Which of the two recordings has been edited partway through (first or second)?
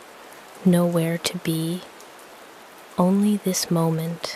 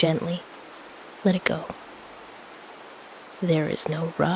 second